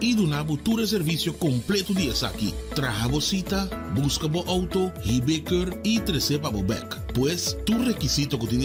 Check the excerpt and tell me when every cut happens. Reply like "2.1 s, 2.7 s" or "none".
none